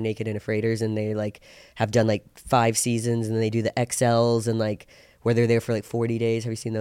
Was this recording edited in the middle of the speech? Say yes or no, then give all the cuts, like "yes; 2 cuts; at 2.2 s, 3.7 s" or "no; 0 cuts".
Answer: no; 0 cuts